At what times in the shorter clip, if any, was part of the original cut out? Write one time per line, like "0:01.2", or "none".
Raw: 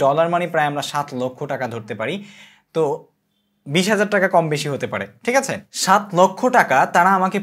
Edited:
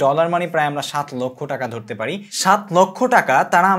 0:02.3